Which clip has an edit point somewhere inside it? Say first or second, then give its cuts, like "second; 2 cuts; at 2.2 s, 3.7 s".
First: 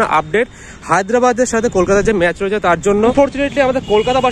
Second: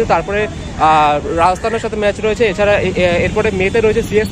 first; 1 cut; at 3.1 s